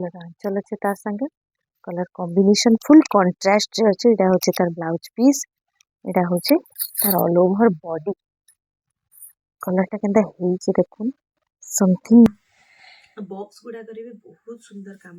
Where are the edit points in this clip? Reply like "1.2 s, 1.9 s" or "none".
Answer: 12.3 s